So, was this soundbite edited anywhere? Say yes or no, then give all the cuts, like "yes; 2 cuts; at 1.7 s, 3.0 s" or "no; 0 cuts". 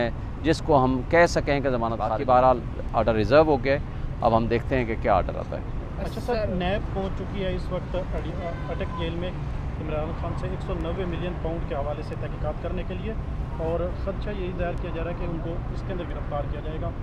no; 0 cuts